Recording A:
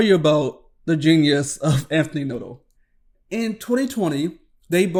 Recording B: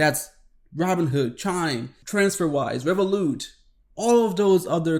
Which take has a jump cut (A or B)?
B